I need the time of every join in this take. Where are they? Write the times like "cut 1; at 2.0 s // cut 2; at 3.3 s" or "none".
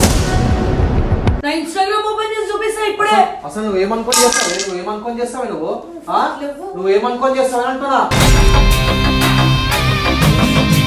cut 1; at 1.4 s